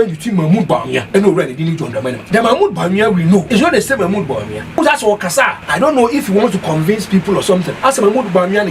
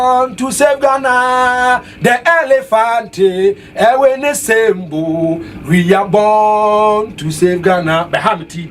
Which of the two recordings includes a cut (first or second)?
first